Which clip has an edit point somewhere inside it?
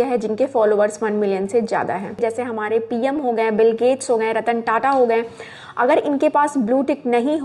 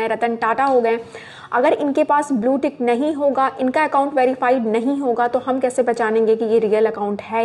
first; 1 cut; at 2.2 s

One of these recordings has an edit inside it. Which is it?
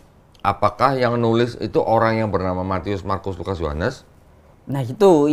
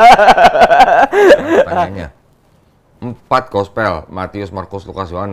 second; 1 cut; at 1.7 s

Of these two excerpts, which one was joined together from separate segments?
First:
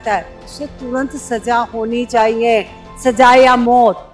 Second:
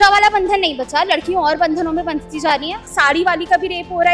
second; 1 cut; at 2.9 s

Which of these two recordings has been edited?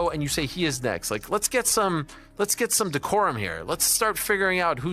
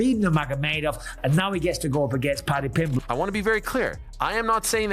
second; 1 cut; at 3.0 s

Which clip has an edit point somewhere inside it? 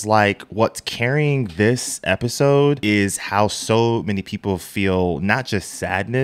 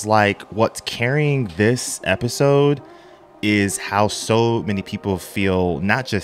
first; 1 cut; at 2.8 s

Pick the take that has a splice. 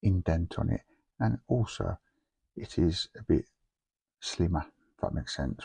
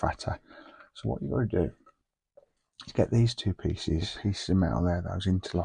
second; 1 cut; at 4.1 s

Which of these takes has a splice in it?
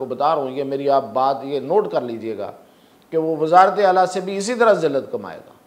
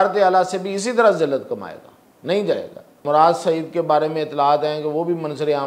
second; 1 cut; at 3.0 s

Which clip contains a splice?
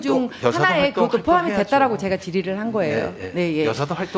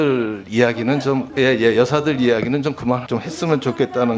second; 2 cuts; at 1.3 s, 3.0 s

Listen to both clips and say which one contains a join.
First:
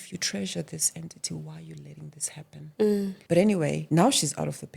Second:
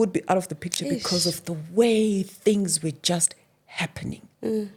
first; 2 cuts; at 3.2 s, 3.8 s

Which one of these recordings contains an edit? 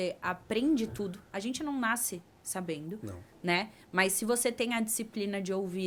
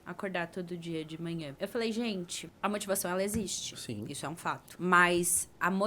second; 3 cuts; at 1.5 s, 2.4 s, 4.7 s

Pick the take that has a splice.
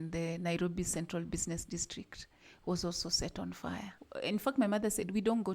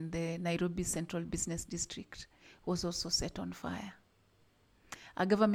first; 1 cut; at 4.0 s

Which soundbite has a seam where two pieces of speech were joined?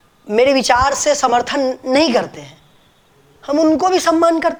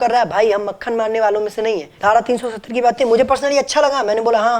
second; 1 cut; at 1.9 s

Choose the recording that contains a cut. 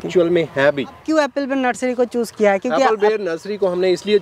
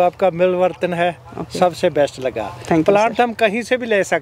first; 1 cut; at 1.0 s

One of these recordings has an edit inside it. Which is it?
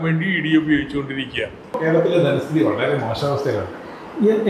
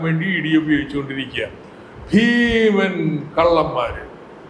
first; 1 cut; at 1.8 s

